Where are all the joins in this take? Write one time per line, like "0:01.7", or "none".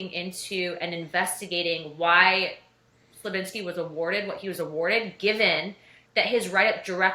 none